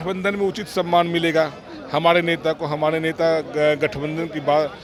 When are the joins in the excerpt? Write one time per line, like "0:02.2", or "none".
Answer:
none